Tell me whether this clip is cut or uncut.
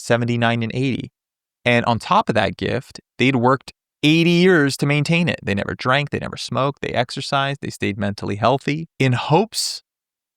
cut